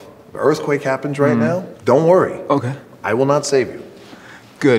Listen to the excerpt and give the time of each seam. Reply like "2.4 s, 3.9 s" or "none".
none